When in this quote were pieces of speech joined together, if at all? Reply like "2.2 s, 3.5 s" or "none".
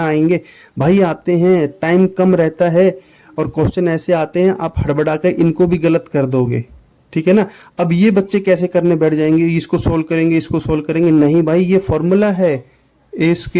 none